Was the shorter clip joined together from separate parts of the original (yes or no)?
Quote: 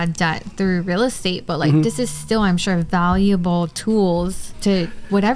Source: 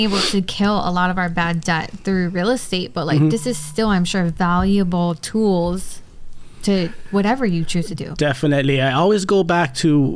yes